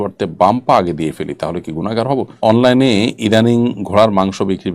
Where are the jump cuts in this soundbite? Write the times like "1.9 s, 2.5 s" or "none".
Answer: 2.6 s